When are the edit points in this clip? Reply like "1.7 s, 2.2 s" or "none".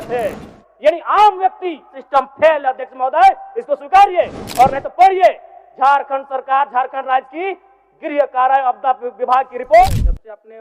1.9 s, 9.8 s